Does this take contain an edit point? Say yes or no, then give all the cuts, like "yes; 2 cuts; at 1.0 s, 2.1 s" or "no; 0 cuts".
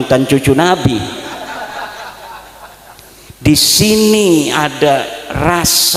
no; 0 cuts